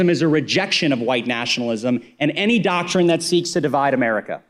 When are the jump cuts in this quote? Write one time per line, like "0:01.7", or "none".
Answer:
none